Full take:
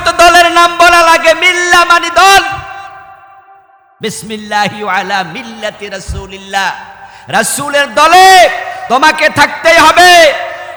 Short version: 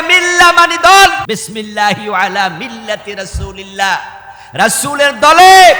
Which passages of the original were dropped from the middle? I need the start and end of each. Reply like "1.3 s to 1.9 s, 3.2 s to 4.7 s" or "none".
2.6 s to 4.0 s